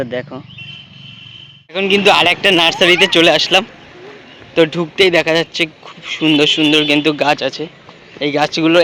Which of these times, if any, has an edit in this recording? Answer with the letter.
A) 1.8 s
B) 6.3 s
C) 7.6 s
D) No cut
A